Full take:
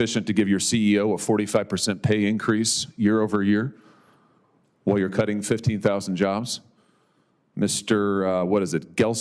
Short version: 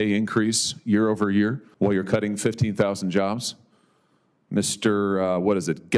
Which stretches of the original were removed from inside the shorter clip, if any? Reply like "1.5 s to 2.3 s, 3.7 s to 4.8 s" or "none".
3.8 s to 4.7 s